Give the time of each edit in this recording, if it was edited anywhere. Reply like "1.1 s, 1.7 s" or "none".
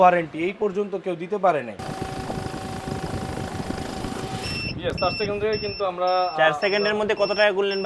1.8 s